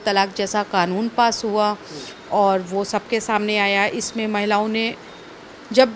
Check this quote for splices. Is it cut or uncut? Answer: uncut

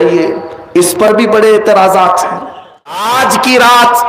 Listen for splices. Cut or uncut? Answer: cut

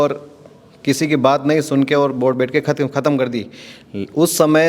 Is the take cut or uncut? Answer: uncut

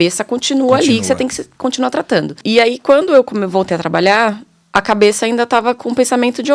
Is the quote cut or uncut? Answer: cut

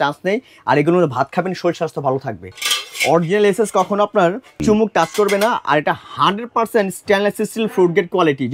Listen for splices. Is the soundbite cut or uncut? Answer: cut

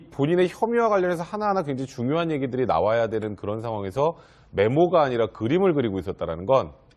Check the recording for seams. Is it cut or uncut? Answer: uncut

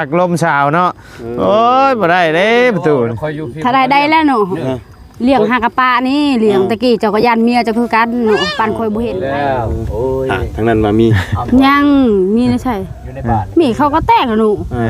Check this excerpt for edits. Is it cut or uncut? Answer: cut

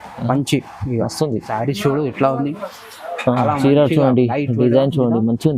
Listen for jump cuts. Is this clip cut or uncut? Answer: cut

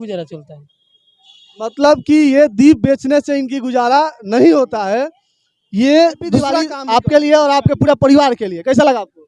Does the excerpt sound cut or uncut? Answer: cut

